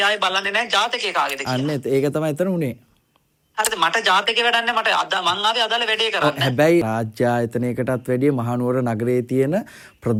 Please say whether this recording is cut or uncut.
uncut